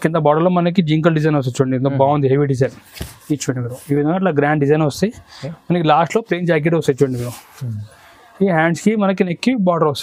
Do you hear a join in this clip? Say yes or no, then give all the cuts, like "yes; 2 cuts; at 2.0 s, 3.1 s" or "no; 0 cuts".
no; 0 cuts